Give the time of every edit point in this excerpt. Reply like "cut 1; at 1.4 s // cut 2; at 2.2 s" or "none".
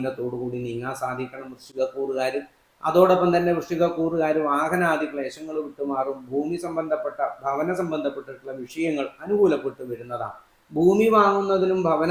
none